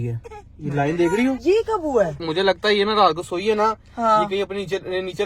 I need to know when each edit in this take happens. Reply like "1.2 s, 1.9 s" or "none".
1.4 s, 2.2 s